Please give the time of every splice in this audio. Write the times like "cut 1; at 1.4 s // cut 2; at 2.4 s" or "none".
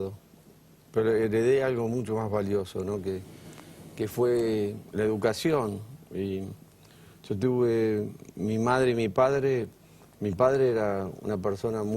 cut 1; at 5.5 s

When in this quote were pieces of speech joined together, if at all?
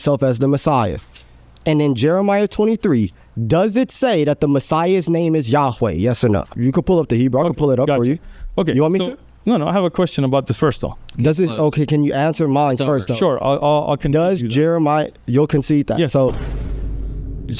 cut 1; at 6.5 s

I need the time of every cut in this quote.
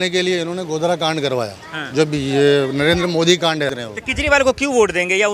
cut 1; at 3.8 s

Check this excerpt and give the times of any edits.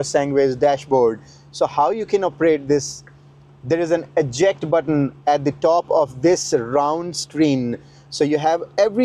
none

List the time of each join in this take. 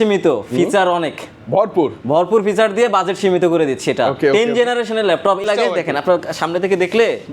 cut 1; at 5.4 s

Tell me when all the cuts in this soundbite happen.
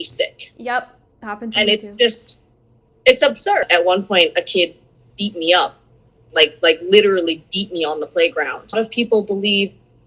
cut 1; at 3.6 s // cut 2; at 8.6 s

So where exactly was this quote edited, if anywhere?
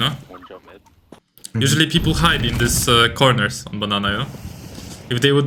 none

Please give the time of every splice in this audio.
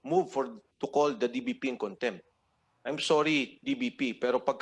none

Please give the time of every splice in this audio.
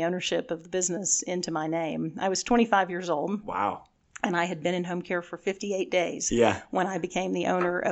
none

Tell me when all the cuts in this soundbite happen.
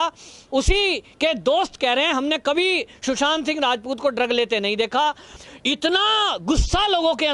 cut 1; at 5.3 s

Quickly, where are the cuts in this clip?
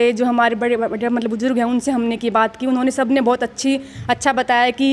none

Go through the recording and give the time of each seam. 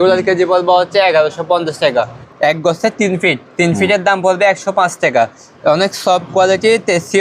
cut 1; at 2.2 s

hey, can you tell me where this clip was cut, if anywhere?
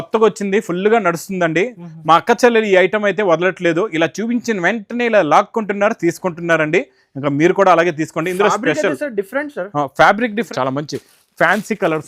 cut 1; at 10.5 s

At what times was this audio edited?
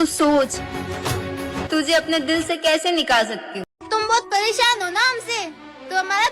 cut 1; at 3.8 s

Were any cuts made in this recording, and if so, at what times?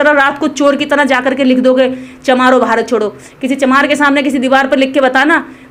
none

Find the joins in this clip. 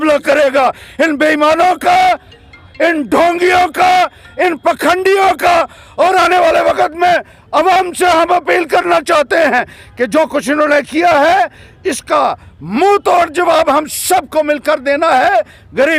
none

